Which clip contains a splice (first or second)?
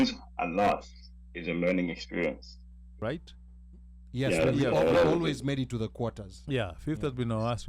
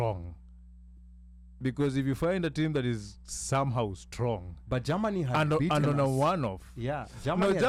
first